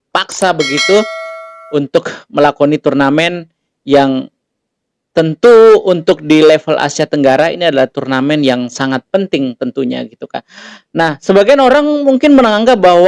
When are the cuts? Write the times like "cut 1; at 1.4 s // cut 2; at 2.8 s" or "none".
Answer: none